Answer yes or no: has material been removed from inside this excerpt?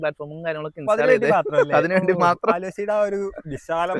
no